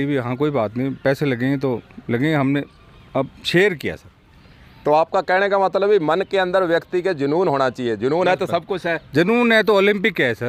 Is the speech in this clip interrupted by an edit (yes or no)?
no